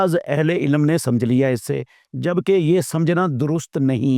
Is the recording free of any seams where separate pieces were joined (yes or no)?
yes